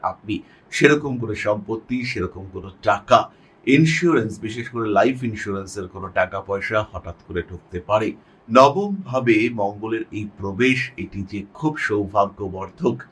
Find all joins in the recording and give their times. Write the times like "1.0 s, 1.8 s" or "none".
8.3 s